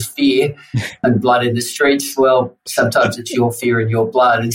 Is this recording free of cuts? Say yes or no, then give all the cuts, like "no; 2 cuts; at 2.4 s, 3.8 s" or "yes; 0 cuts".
no; 1 cut; at 0.9 s